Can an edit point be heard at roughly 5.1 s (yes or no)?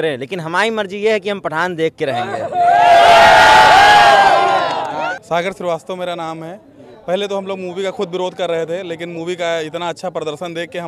yes